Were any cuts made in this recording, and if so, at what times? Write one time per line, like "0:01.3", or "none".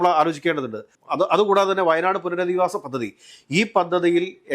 0:01.0